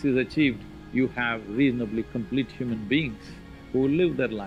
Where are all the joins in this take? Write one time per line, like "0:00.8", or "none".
none